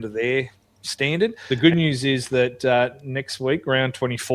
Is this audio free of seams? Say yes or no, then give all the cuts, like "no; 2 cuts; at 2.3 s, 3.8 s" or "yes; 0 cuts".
no; 1 cut; at 1.4 s